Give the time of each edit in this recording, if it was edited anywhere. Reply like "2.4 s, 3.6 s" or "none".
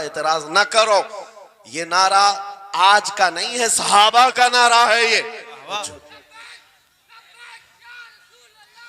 5.8 s